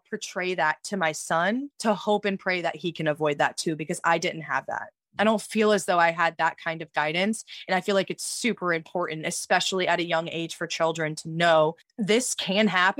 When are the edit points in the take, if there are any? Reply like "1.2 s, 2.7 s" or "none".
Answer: 1.7 s, 11.9 s